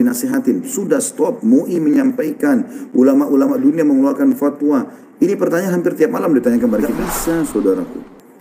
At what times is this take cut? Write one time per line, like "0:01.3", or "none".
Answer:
0:07.5